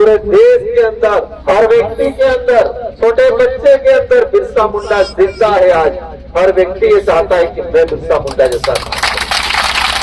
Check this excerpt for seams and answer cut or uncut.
cut